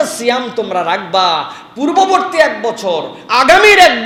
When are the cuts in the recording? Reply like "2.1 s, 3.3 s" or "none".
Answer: none